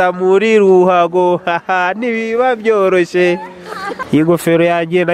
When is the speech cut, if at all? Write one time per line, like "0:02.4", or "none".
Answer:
0:04.0